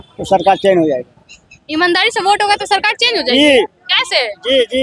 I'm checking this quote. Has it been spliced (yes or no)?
no